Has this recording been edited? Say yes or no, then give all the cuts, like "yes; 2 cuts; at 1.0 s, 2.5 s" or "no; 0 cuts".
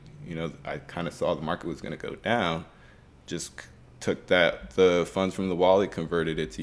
no; 0 cuts